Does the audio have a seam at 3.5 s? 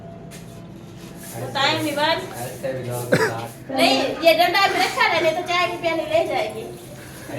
yes; 1 cut; at 3.5 s

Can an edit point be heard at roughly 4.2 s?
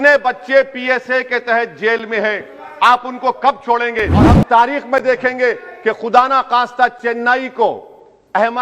yes; 1 cut; at 4.2 s

